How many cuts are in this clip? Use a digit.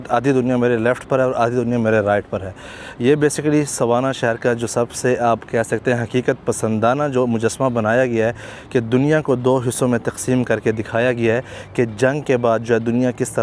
0